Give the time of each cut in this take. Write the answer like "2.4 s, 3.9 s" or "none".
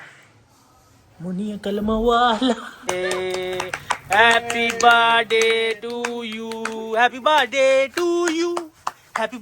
2.8 s